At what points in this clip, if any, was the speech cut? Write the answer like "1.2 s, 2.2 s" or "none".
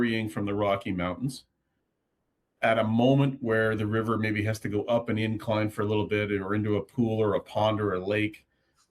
none